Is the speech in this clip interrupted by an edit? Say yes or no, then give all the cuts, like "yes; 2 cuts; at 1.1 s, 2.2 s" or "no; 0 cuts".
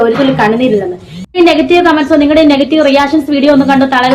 yes; 1 cut; at 1.3 s